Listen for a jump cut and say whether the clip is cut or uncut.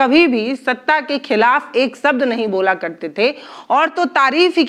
uncut